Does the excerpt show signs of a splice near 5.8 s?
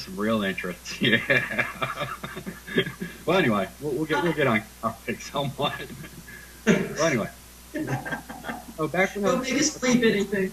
yes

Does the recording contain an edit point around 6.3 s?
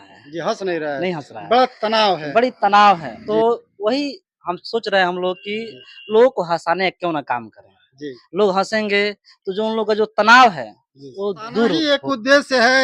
no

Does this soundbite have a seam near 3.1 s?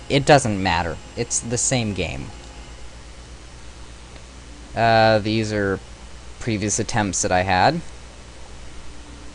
no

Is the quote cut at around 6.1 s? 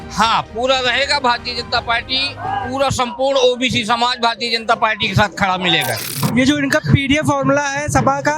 yes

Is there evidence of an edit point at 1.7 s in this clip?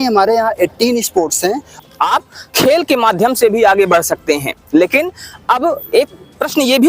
yes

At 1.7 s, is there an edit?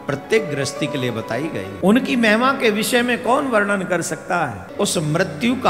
yes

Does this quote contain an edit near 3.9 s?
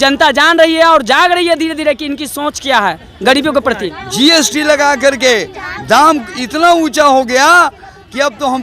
yes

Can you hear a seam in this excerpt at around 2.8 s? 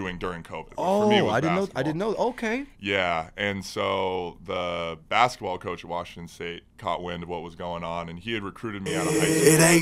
no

